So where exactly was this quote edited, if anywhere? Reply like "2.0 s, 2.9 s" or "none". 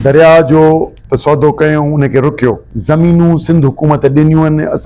1.0 s, 2.7 s